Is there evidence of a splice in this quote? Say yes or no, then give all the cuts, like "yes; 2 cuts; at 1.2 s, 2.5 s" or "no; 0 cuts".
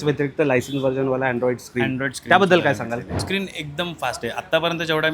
yes; 1 cut; at 3.1 s